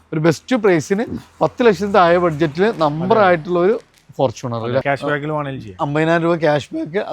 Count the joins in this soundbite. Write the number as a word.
one